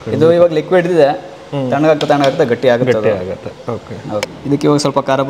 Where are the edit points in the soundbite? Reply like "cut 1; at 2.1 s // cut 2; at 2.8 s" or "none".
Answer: cut 1; at 4.3 s